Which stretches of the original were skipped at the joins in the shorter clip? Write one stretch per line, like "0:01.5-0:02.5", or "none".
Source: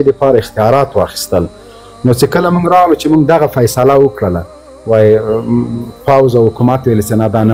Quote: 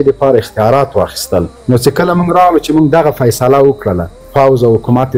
0:01.5-0:01.9
0:04.5-0:05.9

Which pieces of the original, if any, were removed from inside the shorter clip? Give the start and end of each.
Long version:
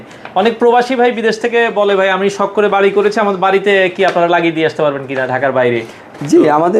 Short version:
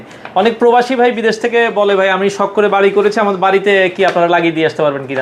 none

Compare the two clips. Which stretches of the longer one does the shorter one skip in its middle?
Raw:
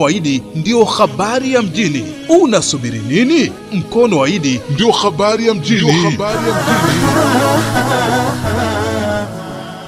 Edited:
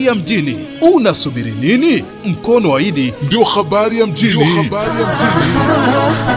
none

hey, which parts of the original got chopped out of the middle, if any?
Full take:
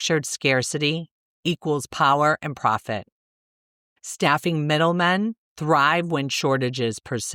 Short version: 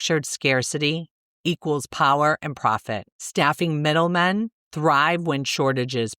0:03.1-0:04.0

